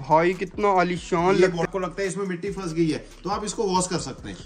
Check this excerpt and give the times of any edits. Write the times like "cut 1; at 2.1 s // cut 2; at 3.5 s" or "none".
cut 1; at 1.7 s